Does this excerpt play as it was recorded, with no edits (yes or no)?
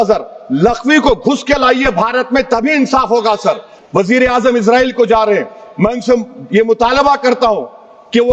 no